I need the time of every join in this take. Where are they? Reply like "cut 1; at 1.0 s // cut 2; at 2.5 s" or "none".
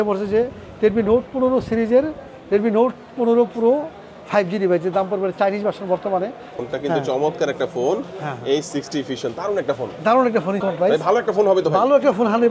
cut 1; at 6.6 s // cut 2; at 10.6 s